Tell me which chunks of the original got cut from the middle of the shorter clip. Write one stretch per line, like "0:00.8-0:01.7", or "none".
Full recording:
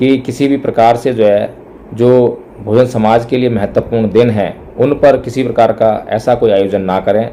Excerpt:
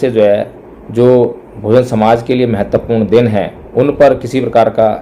none